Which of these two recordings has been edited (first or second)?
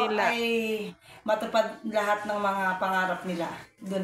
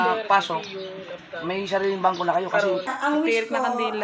second